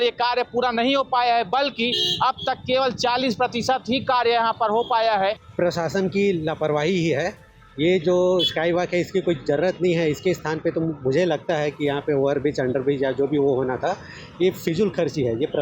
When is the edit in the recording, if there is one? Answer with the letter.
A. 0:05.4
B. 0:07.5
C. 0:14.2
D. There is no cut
A